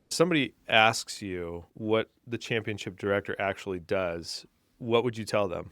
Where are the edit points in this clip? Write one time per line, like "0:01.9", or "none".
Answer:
0:01.7